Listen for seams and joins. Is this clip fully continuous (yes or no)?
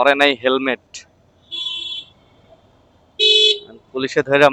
yes